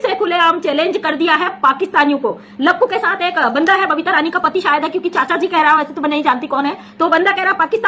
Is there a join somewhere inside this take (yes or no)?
no